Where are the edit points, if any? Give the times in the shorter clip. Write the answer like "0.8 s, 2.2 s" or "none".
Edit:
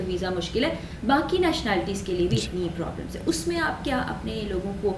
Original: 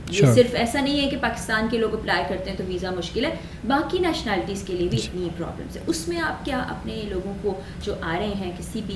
none